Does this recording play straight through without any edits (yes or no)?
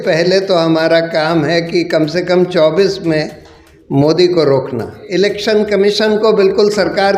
no